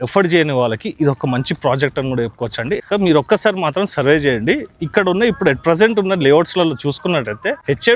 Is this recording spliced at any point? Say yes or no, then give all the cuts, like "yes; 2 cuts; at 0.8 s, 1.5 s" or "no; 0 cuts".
yes; 1 cut; at 2.8 s